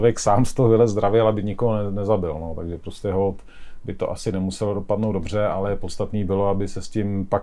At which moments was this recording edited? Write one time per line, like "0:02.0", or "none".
none